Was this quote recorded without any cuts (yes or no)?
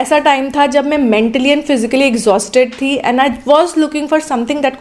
yes